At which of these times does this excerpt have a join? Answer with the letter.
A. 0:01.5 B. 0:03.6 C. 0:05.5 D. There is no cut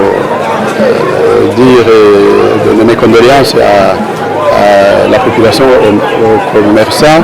D